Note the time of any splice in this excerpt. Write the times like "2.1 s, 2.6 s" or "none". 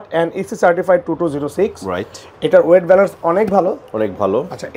none